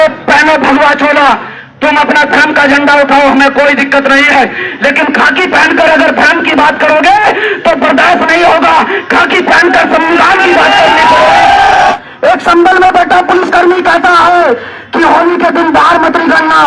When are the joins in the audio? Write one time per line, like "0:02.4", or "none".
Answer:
0:11.9